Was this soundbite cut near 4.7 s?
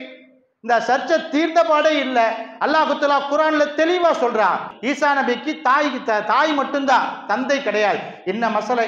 yes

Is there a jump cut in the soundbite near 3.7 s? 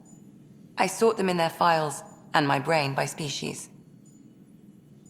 yes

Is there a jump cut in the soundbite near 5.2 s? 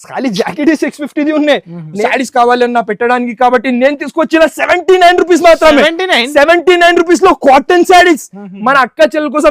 no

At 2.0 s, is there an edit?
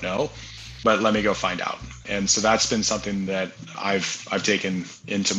yes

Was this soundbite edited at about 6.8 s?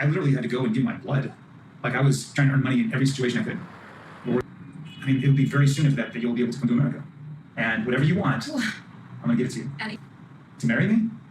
no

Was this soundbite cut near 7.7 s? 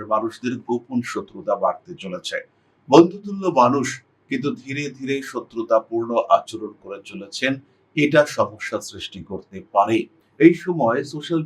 no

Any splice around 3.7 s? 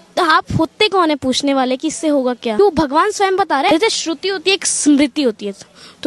yes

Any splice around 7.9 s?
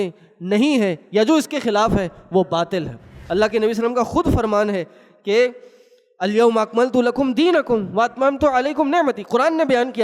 no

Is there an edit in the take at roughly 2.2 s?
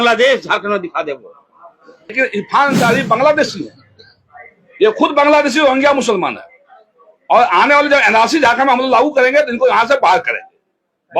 yes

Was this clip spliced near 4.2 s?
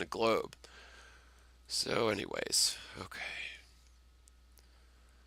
yes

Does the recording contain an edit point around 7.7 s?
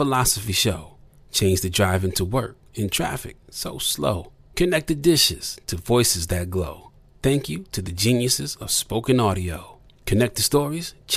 no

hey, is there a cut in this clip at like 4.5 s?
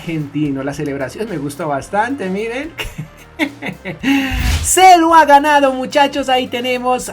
yes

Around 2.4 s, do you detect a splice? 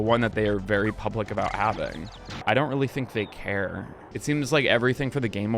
yes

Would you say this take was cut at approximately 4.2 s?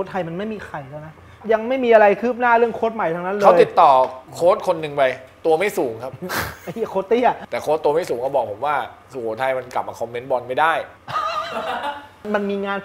yes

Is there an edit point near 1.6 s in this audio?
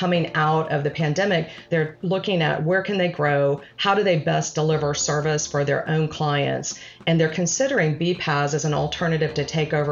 yes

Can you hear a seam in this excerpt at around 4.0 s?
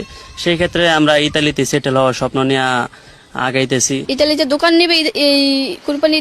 yes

